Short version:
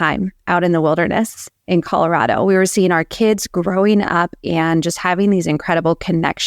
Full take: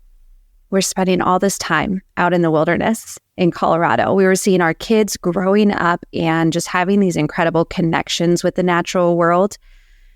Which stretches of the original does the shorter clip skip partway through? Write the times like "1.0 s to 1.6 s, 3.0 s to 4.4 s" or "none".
none